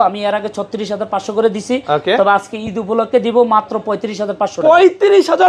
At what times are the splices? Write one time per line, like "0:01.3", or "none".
none